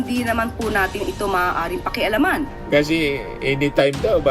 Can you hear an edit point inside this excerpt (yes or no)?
yes